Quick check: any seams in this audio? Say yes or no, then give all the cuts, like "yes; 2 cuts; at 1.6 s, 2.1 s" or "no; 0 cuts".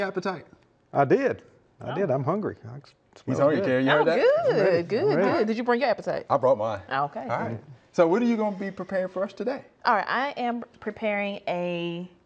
yes; 1 cut; at 4.6 s